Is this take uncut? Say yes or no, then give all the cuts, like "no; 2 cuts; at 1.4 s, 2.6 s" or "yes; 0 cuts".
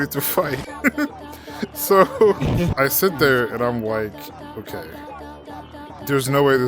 no; 1 cut; at 2.7 s